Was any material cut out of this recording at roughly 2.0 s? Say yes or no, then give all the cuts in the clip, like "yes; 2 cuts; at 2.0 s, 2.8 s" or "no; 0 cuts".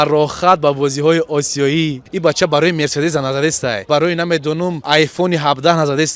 yes; 3 cuts; at 2.0 s, 3.9 s, 4.8 s